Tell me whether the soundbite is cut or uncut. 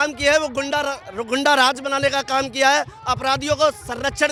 uncut